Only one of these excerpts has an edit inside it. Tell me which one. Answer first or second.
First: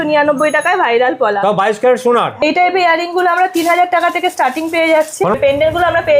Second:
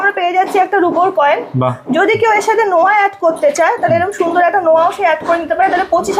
first